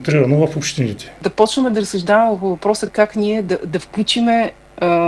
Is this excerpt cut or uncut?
cut